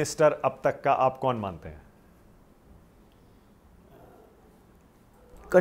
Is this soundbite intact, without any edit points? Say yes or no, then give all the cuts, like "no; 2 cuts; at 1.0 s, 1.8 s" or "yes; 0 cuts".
yes; 0 cuts